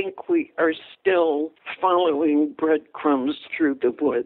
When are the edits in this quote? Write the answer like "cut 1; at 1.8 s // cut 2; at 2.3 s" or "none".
cut 1; at 1.6 s